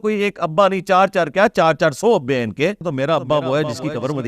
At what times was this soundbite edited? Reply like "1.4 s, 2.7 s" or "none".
2.9 s